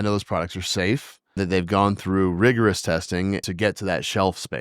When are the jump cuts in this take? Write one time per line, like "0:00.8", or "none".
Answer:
0:01.4
0:03.4